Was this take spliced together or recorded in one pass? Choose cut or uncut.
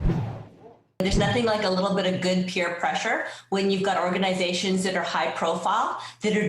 cut